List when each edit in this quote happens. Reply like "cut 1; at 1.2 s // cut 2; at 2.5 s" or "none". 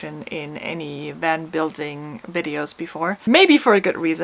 cut 1; at 3.3 s